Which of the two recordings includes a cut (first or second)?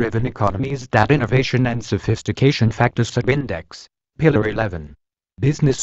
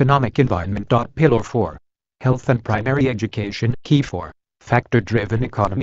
second